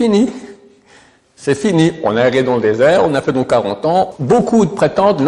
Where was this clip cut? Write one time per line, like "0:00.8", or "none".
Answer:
0:04.1